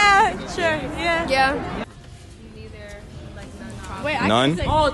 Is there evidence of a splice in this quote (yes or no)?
yes